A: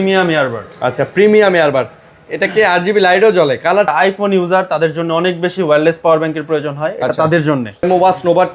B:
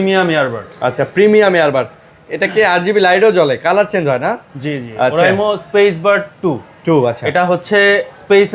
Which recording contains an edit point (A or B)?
A